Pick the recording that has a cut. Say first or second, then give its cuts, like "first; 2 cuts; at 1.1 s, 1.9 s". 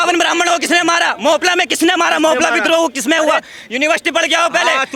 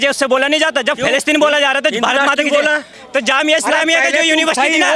second; 1 cut; at 3.0 s